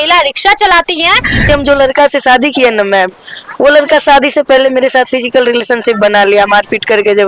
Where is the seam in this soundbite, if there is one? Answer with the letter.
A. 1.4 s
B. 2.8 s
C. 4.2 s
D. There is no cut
A